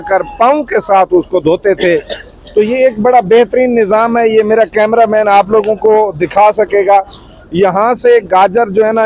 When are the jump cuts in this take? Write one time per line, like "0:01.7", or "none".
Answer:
none